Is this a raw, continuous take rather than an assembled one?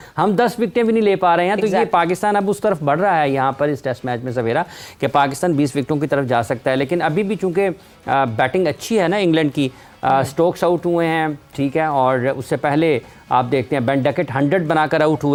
yes; 0 cuts

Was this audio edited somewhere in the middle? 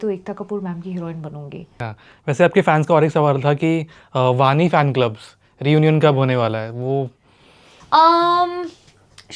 yes; 1 cut; at 1.6 s

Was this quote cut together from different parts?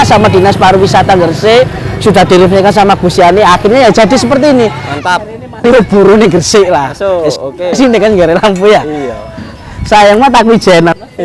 no; 0 cuts

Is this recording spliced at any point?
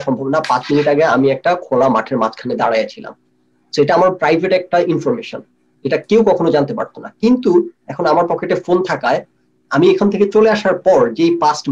no; 0 cuts

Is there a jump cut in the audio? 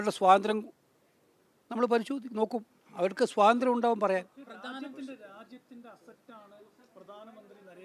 no; 0 cuts

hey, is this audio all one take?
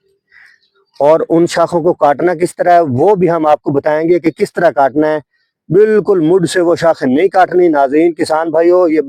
yes; 0 cuts

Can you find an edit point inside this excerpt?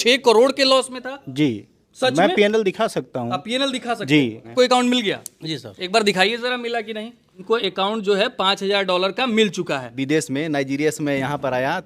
yes; 3 cuts; at 4.5 s, 7.4 s, 9.9 s

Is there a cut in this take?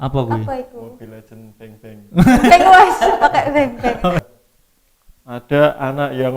yes; 1 cut; at 4.2 s

